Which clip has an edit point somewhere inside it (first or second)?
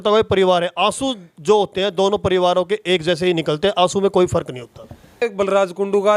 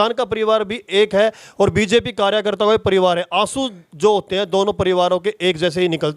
first